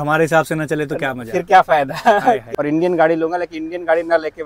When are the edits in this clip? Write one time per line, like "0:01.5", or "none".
0:02.5